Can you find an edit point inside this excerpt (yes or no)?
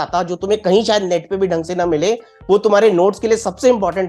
no